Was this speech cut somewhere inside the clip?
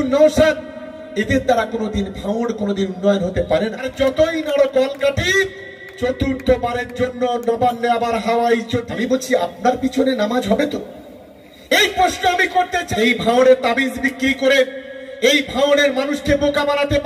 yes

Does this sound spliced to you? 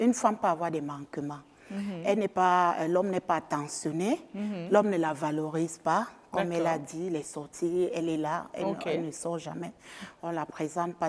no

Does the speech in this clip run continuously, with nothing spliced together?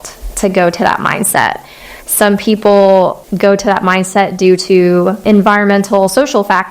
no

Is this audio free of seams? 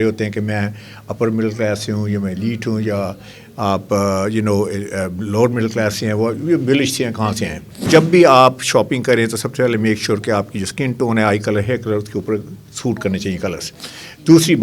no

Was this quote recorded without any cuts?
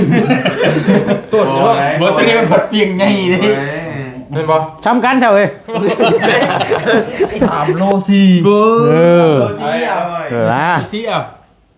no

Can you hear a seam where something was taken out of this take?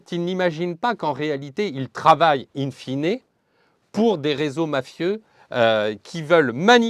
no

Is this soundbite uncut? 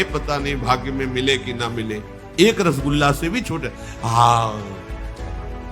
no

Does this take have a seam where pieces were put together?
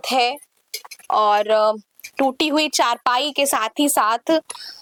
no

